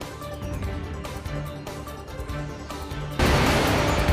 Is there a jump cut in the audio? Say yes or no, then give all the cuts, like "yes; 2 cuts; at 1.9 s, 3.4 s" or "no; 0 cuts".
yes; 2 cuts; at 2.0 s, 3.2 s